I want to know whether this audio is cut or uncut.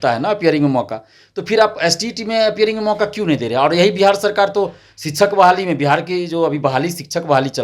uncut